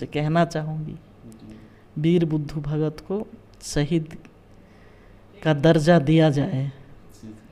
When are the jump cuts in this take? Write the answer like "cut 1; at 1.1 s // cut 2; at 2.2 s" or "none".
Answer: none